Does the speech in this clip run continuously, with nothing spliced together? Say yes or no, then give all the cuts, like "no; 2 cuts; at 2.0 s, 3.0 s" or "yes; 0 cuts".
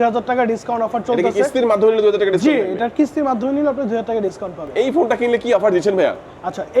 no; 1 cut; at 4.6 s